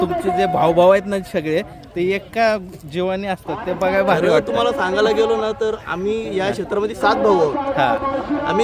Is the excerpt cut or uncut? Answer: uncut